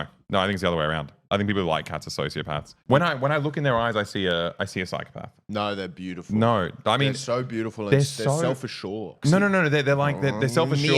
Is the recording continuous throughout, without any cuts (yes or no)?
no